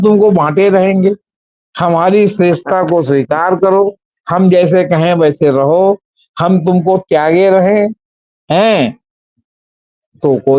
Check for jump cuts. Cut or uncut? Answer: uncut